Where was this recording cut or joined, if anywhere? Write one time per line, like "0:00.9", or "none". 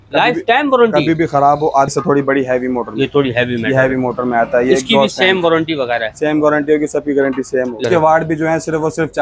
0:01.9
0:07.8